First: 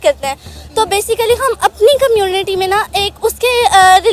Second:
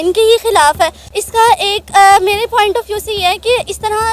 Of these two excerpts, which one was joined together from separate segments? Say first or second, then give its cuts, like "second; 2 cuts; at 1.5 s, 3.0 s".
second; 1 cut; at 1.0 s